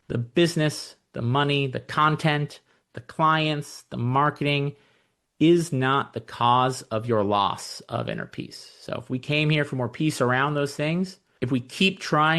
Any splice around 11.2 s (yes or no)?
yes